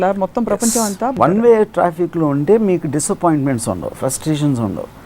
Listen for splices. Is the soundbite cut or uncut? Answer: cut